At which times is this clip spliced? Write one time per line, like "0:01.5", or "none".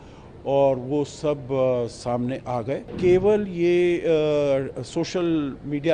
0:02.9